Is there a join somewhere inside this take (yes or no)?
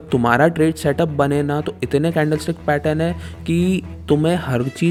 no